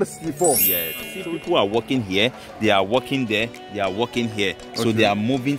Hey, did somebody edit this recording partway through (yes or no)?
yes